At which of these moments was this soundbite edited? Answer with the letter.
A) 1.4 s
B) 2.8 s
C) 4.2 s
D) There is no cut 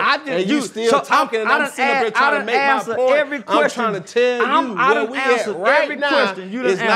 D